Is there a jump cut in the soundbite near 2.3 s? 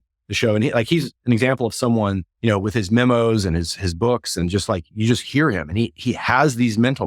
yes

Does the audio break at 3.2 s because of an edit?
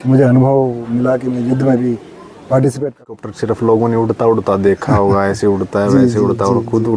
yes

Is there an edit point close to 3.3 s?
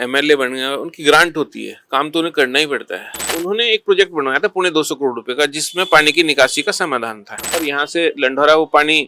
yes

